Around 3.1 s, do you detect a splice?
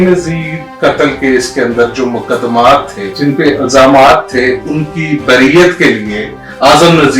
yes; 1 cut; at 3.1 s

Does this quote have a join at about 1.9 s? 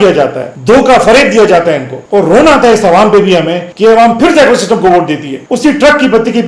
yes; 2 cuts; at 1.9 s, 5.3 s

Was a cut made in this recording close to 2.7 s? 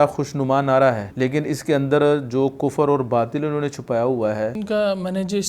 no; 2 cuts; at 1.1 s, 4.6 s

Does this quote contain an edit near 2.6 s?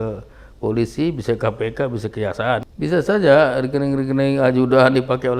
yes; 1 cut; at 2.6 s

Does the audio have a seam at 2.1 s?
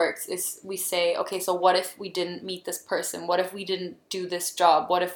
no; 0 cuts

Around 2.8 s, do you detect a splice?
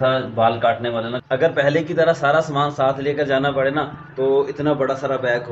no; 1 cut; at 1.2 s

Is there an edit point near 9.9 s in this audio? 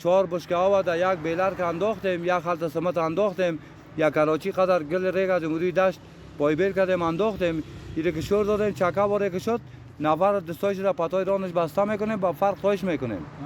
no; 0 cuts

